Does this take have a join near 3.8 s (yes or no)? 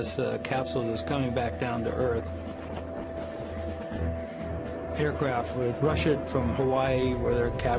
yes